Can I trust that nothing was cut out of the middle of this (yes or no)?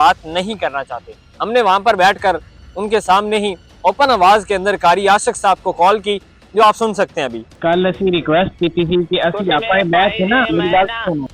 yes